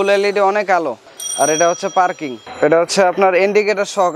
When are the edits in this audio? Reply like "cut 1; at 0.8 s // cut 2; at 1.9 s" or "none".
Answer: none